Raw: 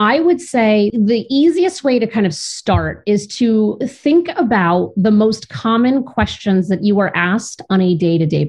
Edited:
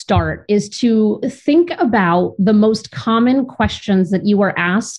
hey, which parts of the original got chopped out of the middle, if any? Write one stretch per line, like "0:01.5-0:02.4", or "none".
none